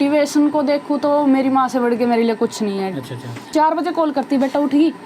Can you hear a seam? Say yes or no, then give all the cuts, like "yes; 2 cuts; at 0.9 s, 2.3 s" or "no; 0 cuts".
yes; 1 cut; at 3.5 s